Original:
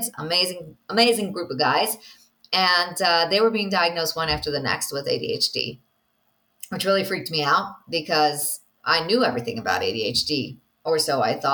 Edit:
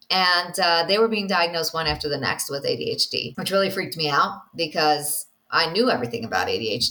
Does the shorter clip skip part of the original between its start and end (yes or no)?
yes